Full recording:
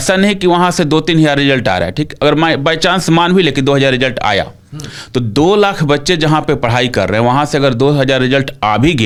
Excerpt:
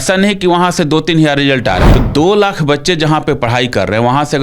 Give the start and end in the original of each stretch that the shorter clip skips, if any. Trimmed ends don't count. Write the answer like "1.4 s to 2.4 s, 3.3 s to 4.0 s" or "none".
1.9 s to 5.1 s